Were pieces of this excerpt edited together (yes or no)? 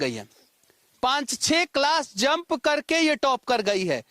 no